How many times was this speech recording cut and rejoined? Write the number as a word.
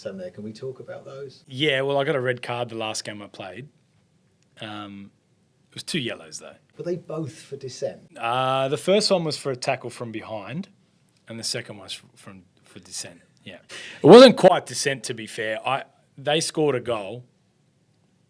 zero